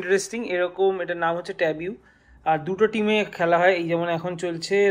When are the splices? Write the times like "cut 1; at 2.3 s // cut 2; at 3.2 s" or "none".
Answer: none